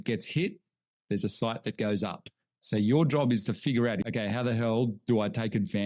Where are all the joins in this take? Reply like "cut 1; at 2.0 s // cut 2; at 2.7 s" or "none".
cut 1; at 2.6 s // cut 2; at 4.0 s

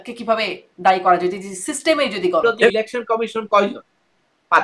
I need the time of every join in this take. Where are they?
cut 1; at 2.7 s

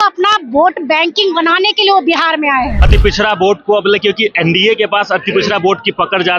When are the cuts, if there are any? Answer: cut 1; at 2.8 s

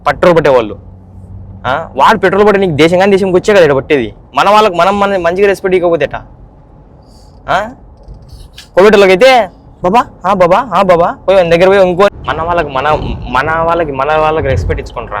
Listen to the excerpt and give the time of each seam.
cut 1; at 12.1 s

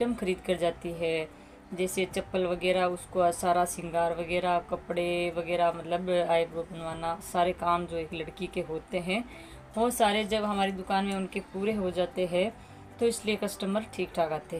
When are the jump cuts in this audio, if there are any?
none

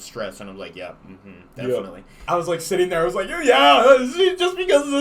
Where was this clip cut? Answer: cut 1; at 2.2 s

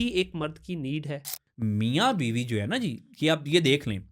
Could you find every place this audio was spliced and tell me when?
cut 1; at 1.4 s

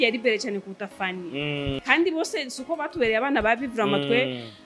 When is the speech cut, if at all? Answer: cut 1; at 1.8 s

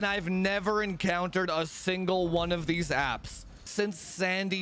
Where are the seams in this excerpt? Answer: cut 1; at 3.7 s

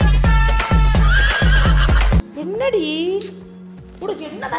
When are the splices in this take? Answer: cut 1; at 2.2 s

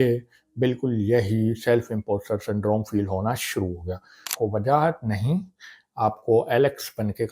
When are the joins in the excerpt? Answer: cut 1; at 4.3 s

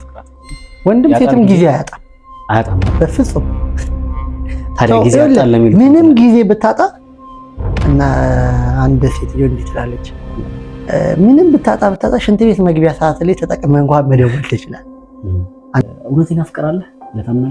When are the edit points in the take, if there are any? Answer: cut 1; at 15.8 s

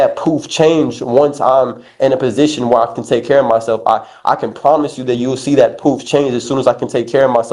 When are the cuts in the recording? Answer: none

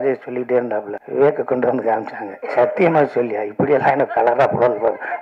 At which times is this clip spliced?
cut 1; at 1.0 s

